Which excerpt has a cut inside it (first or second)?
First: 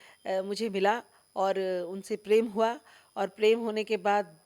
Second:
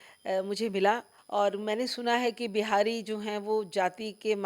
second